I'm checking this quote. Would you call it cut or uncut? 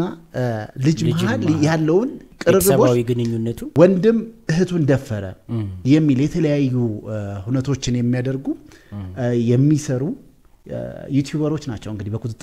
cut